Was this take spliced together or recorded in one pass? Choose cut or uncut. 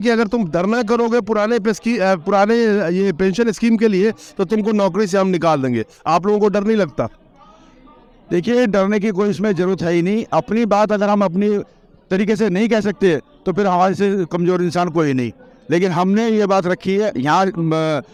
uncut